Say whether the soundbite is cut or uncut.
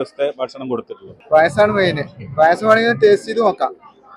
cut